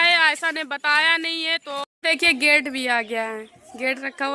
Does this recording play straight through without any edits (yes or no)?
no